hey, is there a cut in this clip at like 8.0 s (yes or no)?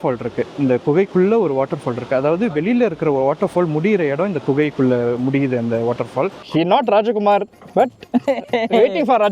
no